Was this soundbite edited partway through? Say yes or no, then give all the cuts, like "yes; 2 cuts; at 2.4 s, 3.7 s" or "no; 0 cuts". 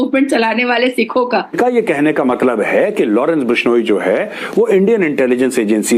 yes; 1 cut; at 1.6 s